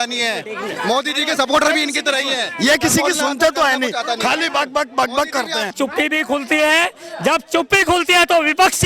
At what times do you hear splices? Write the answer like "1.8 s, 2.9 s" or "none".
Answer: 5.7 s